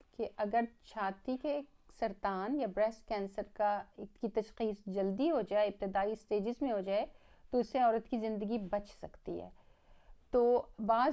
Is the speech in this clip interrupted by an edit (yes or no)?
no